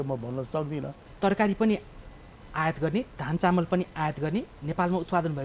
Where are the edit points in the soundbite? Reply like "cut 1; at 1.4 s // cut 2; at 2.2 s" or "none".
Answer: cut 1; at 1.0 s